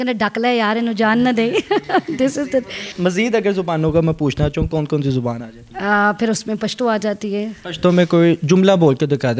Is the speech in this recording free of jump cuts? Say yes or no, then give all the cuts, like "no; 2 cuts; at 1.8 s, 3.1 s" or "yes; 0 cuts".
yes; 0 cuts